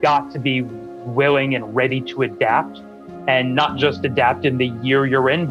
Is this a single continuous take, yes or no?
yes